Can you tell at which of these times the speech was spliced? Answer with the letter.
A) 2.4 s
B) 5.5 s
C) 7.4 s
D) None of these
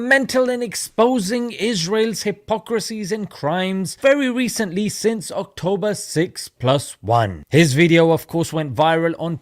C